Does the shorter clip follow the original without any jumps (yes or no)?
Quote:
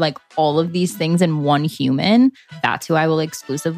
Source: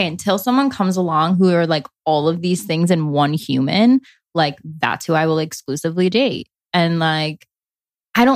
no